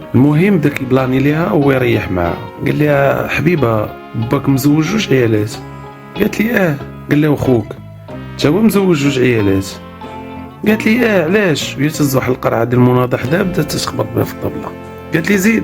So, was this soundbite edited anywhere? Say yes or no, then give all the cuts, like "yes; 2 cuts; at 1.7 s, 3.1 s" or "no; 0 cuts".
yes; 2 cuts; at 2.5 s, 6.9 s